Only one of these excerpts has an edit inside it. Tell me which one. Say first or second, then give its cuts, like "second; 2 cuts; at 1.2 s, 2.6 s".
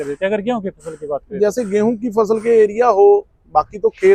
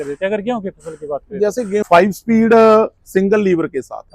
second; 1 cut; at 1.8 s